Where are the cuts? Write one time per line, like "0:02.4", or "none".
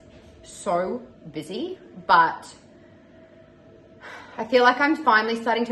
none